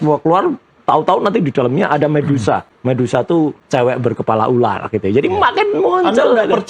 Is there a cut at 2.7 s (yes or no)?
yes